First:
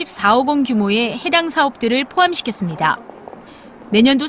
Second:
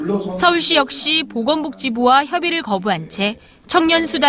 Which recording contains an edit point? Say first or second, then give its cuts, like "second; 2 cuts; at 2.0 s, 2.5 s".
second; 1 cut; at 1.3 s